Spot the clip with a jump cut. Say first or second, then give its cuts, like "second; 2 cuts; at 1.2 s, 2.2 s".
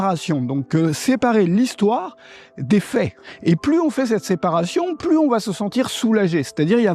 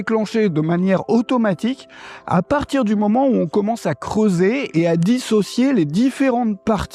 first; 1 cut; at 5.0 s